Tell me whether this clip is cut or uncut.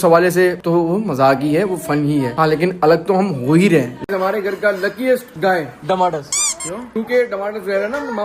cut